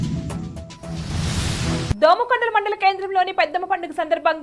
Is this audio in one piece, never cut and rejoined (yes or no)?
yes